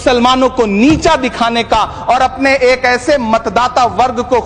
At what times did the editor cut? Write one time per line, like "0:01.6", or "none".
none